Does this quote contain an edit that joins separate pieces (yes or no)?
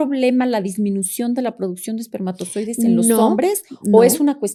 no